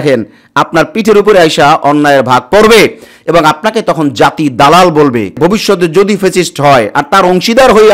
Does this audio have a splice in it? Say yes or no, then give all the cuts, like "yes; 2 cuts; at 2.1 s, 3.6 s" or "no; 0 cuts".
yes; 1 cut; at 5.4 s